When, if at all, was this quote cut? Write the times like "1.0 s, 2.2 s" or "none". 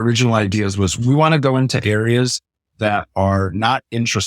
1.0 s